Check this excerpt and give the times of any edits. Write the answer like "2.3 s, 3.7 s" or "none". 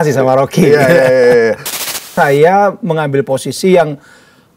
2.0 s